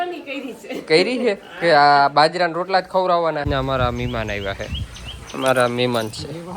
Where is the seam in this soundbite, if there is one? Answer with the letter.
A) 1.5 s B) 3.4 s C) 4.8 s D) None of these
B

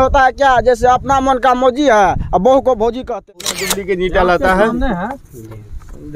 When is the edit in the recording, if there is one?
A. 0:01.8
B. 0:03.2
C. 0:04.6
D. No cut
B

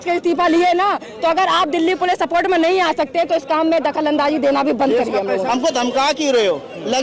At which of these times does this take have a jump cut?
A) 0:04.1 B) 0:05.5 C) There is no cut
B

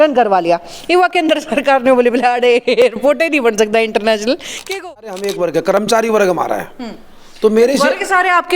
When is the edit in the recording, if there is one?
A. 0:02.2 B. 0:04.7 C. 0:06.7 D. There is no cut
B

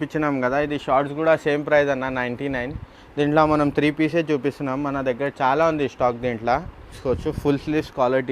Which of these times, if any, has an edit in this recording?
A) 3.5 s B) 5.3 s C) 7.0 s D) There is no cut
C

